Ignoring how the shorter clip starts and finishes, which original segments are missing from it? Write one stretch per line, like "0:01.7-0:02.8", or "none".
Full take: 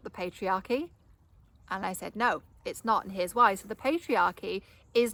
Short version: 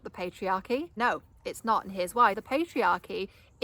0:00.9-0:02.1
0:03.6-0:03.7